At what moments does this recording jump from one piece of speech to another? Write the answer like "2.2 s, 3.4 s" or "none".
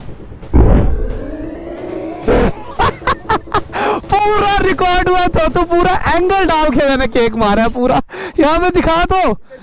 none